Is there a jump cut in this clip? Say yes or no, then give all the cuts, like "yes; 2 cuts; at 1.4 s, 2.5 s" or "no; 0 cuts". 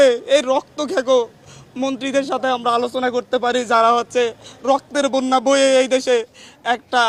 no; 0 cuts